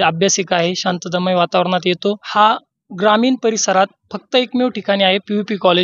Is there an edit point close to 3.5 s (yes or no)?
no